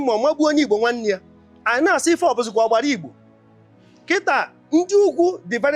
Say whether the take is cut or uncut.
uncut